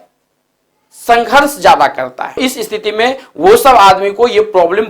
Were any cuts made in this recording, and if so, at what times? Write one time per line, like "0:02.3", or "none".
0:02.4